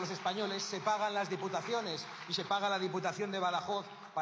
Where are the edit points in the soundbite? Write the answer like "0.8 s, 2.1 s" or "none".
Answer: none

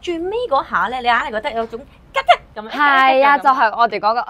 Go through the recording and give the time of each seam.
none

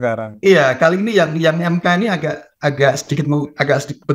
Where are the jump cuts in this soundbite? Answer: none

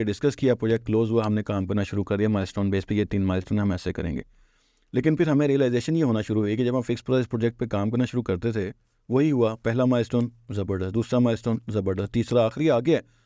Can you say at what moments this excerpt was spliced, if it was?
none

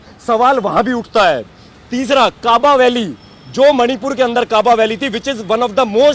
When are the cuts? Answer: none

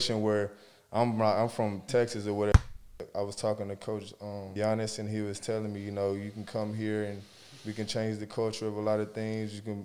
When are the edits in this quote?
2.8 s, 4.5 s

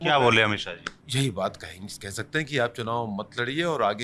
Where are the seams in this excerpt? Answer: 0.9 s

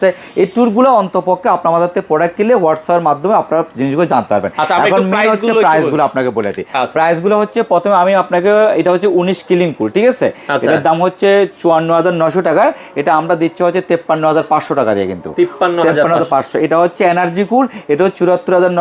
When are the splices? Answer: none

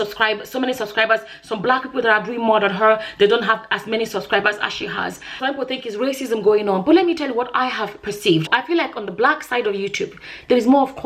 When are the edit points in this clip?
5.3 s, 8.5 s

